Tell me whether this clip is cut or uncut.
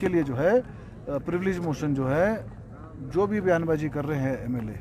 uncut